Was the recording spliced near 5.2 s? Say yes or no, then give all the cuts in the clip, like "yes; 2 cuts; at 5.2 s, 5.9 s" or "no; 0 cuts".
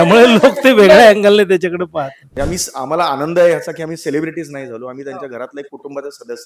no; 1 cut; at 2.2 s